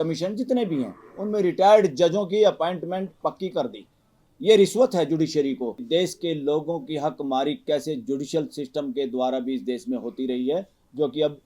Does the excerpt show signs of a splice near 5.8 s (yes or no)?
yes